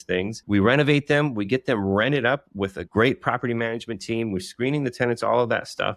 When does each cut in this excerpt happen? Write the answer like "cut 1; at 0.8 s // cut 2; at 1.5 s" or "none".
none

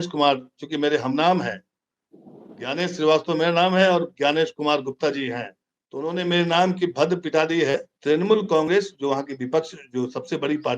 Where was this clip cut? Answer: cut 1; at 7.9 s

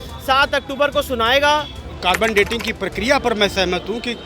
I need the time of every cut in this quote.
cut 1; at 1.9 s

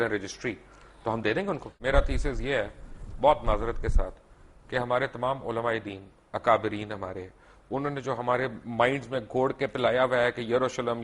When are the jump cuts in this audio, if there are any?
cut 1; at 1.7 s

